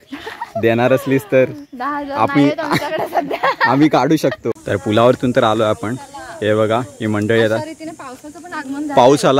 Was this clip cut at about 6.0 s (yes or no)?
no